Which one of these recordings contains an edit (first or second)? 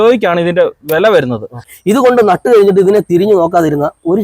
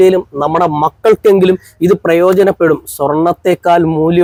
first